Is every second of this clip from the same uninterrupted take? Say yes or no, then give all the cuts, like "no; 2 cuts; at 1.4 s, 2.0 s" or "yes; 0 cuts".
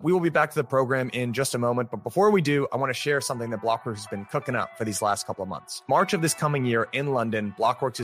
yes; 0 cuts